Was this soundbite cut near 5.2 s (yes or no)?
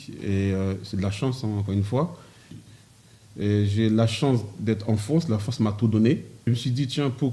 no